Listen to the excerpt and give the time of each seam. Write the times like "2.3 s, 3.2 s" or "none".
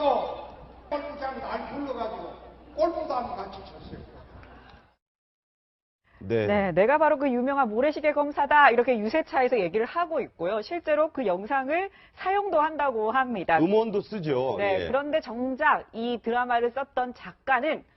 13.1 s